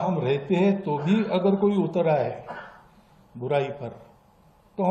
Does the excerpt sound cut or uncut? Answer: uncut